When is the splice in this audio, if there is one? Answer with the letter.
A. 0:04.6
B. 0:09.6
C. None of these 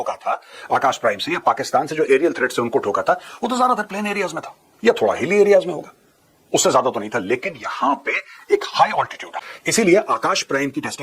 B